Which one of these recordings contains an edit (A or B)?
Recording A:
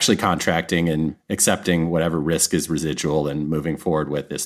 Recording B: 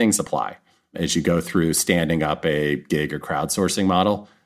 B